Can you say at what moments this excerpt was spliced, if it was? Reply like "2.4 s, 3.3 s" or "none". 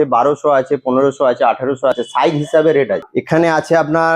2.0 s, 3.1 s